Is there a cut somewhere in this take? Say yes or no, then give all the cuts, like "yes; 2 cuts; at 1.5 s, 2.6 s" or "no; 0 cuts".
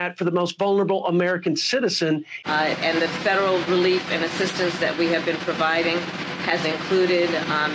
yes; 1 cut; at 2.3 s